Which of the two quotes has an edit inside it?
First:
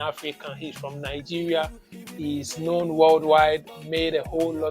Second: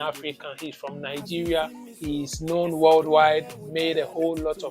second; 1 cut; at 1.9 s

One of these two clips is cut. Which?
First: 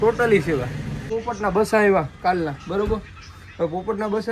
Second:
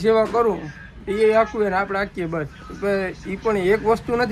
first; 1 cut; at 1.0 s

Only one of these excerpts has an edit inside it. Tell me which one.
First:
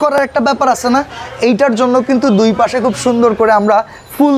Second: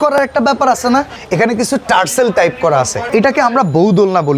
second; 2 cuts; at 1.2 s, 3.0 s

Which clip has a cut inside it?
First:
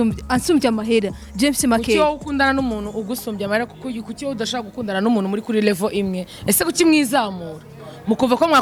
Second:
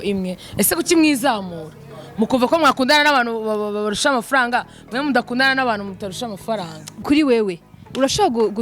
second; 1 cut; at 7.0 s

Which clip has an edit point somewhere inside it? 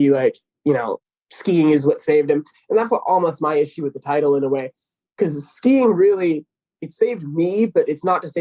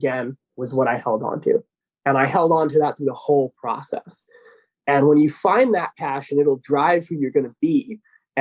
first; 1 cut; at 0.9 s

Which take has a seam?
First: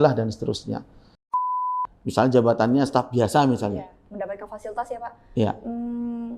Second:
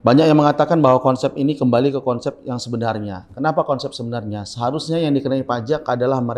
first; 1 cut; at 1.5 s

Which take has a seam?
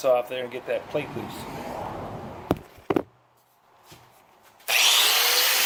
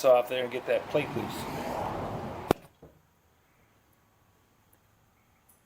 second; 1 cut; at 2.5 s

